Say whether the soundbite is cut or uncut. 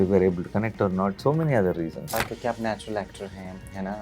cut